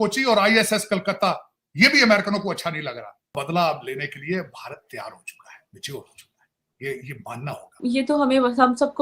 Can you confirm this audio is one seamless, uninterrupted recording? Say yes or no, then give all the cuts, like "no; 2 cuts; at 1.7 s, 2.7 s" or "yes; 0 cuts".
no; 2 cuts; at 3.4 s, 7.8 s